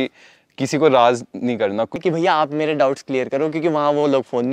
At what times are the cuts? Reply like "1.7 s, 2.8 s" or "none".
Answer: 2.0 s